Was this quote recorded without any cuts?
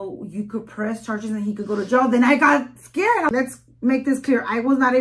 no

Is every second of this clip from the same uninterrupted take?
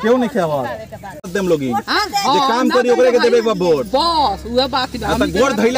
no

